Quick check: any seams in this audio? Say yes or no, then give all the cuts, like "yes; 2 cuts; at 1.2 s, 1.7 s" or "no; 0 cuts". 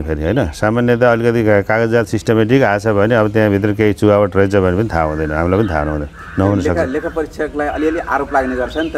no; 0 cuts